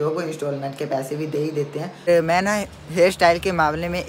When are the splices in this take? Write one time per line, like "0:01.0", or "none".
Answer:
0:02.1